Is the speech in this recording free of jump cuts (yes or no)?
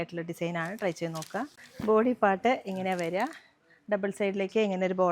no